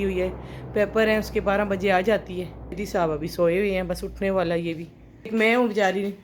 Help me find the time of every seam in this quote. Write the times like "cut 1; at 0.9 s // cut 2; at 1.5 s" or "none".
cut 1; at 2.8 s // cut 2; at 5.3 s